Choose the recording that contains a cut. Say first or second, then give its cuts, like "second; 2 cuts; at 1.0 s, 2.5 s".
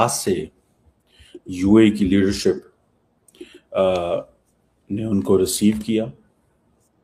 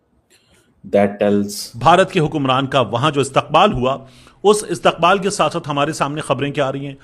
second; 1 cut; at 1.6 s